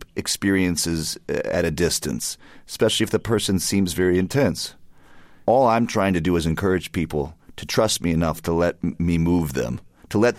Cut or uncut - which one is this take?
cut